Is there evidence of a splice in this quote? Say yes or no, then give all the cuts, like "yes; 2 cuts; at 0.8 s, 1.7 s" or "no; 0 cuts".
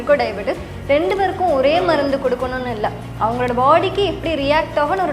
no; 0 cuts